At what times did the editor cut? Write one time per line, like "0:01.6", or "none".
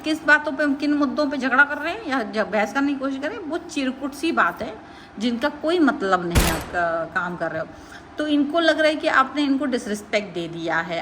0:06.6